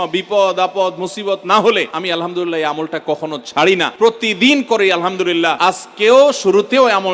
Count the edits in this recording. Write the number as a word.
three